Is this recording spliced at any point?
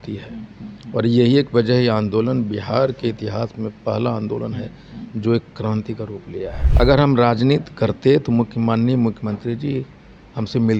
yes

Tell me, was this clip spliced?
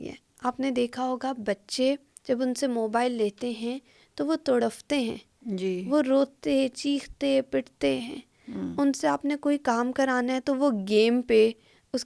no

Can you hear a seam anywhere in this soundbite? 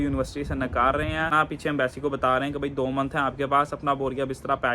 yes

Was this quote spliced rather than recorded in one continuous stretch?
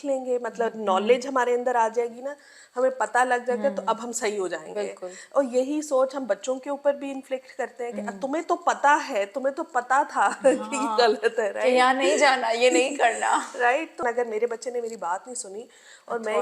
yes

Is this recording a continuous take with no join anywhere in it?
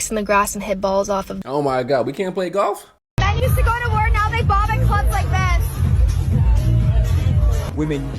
no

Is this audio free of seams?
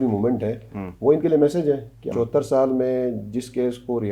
no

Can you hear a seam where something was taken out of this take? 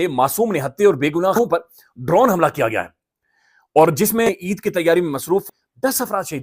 yes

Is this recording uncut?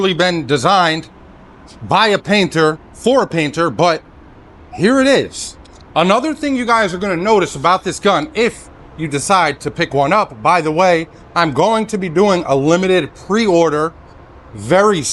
yes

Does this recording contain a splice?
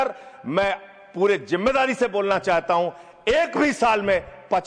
no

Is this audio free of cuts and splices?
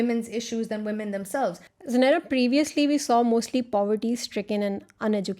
no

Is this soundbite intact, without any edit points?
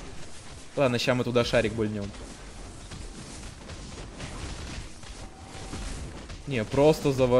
yes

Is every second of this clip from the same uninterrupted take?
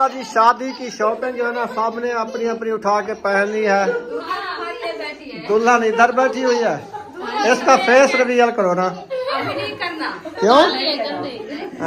yes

